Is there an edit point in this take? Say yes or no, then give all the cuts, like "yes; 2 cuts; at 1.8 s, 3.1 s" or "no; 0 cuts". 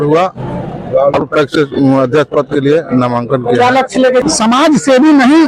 yes; 1 cut; at 4.2 s